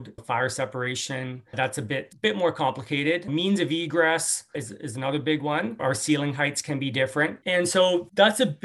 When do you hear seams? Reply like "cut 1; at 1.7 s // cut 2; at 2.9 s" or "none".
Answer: cut 1; at 7.5 s